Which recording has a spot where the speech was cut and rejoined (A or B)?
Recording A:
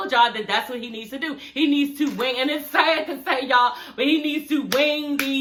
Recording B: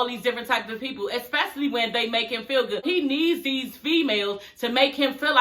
B